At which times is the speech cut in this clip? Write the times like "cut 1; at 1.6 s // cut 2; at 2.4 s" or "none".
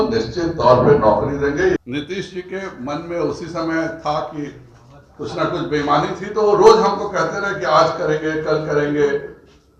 cut 1; at 1.8 s